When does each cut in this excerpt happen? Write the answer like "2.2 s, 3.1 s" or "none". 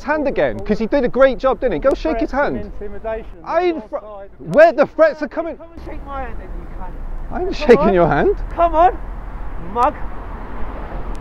none

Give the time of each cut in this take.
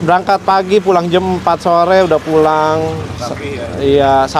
none

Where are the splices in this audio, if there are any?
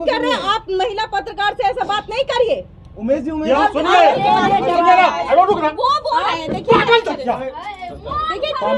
3.6 s

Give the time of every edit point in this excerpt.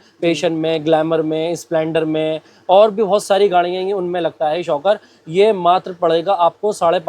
none

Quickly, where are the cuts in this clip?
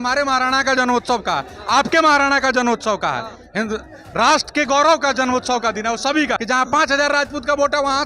6.4 s

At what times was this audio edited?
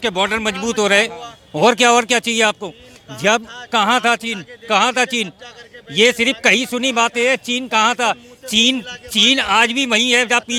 none

